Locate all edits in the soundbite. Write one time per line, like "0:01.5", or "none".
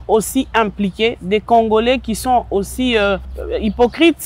0:03.3